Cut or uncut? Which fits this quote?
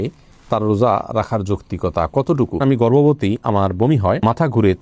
cut